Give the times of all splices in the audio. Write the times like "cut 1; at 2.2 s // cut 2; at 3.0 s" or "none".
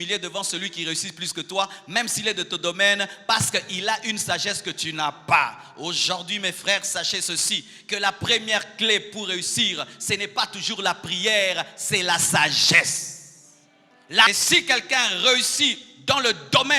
cut 1; at 14.3 s